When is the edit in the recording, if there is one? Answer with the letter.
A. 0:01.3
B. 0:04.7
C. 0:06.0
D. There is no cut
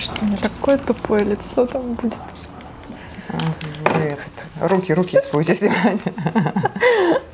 D